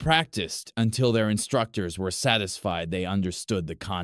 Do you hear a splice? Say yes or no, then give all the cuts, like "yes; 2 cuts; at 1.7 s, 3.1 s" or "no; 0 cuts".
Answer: yes; 2 cuts; at 1.9 s, 3.1 s